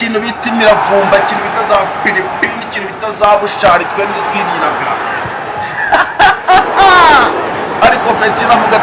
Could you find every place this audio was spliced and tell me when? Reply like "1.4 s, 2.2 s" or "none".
none